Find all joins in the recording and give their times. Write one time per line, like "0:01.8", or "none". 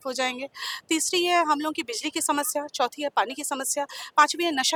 none